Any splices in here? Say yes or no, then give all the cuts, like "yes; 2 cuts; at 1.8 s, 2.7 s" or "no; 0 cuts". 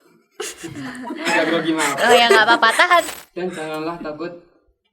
yes; 1 cut; at 3.1 s